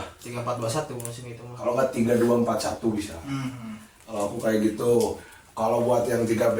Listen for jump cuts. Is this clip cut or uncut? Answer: uncut